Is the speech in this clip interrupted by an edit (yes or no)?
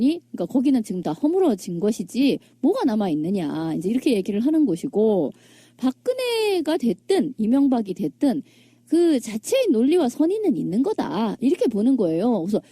yes